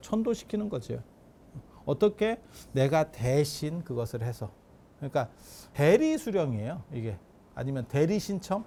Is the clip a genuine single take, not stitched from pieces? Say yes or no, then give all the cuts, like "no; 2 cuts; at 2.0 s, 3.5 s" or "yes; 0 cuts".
yes; 0 cuts